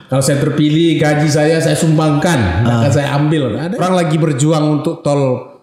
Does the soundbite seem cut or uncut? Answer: cut